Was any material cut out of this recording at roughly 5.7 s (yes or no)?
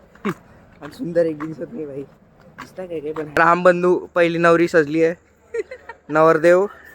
no